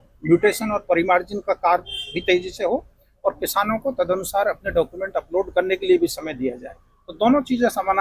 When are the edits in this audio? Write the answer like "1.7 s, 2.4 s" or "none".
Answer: none